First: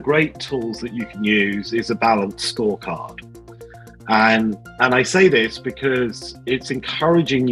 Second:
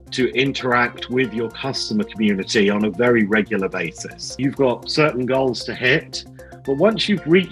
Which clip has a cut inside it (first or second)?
second